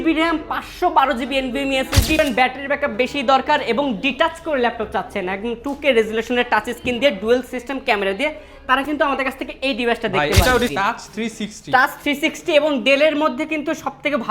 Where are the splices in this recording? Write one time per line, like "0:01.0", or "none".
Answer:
0:02.2
0:10.7